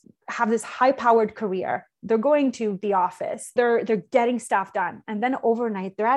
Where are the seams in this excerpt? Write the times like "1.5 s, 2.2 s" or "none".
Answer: 3.5 s